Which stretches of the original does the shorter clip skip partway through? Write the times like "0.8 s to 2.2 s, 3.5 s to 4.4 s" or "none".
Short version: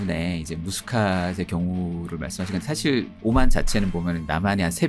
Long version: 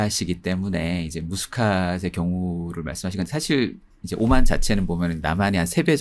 3.8 s to 4.1 s

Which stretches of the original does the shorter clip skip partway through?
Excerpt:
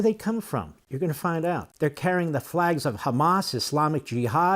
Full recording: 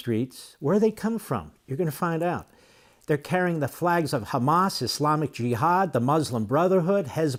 2.5 s to 3.0 s

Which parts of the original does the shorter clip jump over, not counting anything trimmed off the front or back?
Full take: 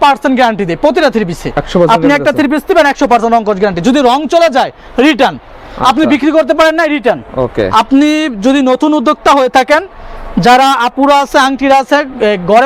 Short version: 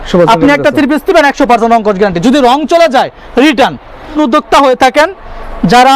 5.8 s to 8.9 s

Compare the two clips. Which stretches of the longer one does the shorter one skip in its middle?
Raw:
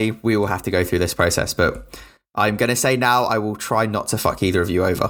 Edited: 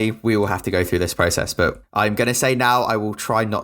1.8 s to 2.2 s

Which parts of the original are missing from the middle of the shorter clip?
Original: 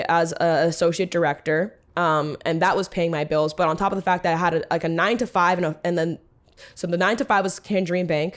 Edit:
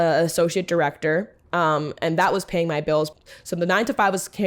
3.5 s to 6.4 s

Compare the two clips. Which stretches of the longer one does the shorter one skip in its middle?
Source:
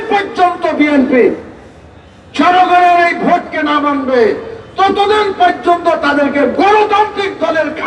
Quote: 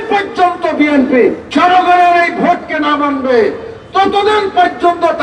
1.4 s to 2.3 s

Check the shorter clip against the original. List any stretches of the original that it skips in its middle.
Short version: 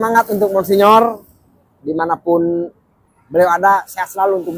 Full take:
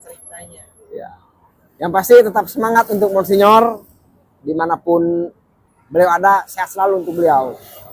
none

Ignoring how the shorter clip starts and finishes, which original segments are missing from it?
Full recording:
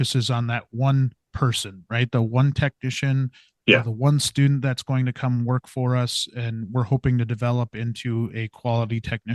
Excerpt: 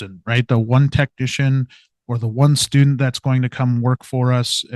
none

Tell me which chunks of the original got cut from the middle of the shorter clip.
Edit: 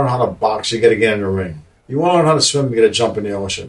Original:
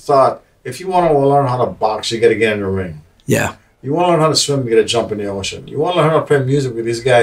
3.1 s to 3.6 s

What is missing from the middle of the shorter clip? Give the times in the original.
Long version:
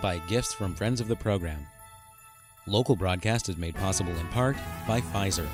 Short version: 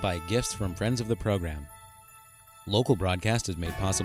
none

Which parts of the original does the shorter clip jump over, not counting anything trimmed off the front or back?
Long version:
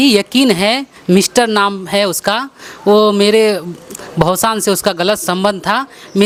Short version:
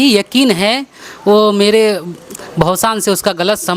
0.9 s to 2.5 s

